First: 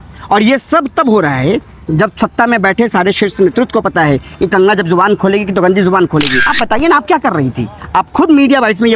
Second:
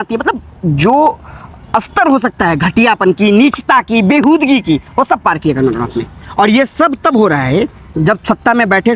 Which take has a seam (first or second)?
first